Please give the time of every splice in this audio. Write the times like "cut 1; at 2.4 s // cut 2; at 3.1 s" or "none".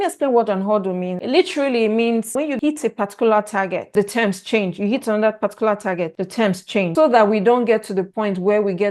cut 1; at 6.9 s